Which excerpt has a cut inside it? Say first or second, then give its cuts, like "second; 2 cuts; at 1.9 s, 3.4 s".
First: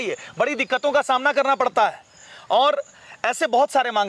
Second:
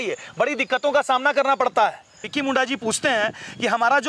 second; 1 cut; at 2.3 s